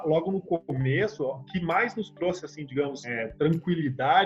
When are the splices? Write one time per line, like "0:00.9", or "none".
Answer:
0:01.5
0:03.1